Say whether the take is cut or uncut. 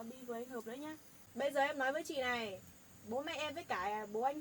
cut